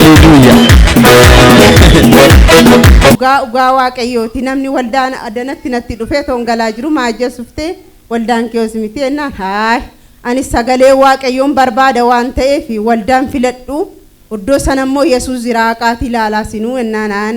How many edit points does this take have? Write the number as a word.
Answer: one